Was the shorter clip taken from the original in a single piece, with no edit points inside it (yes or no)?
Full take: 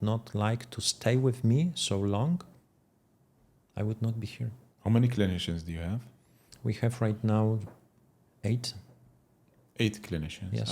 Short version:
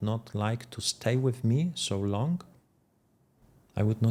yes